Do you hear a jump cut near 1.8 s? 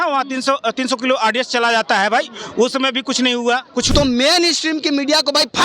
no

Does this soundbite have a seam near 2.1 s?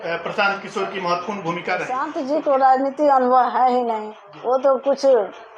yes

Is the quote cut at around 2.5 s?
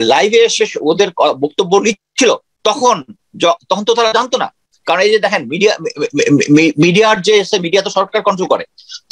yes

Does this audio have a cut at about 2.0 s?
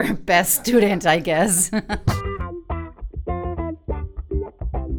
yes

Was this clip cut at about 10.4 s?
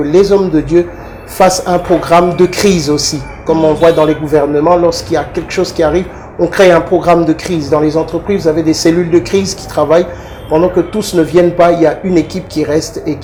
no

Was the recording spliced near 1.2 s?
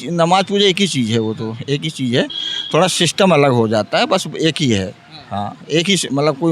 no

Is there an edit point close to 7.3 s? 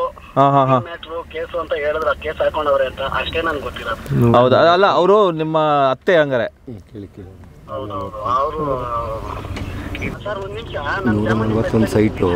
no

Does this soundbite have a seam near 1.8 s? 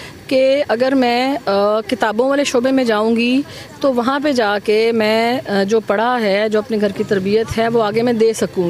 no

